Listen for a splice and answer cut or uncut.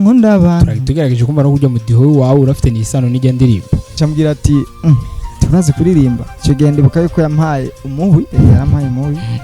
cut